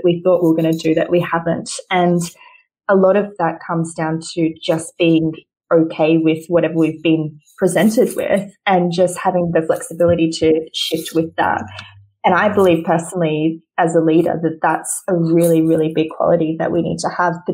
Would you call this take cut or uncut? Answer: uncut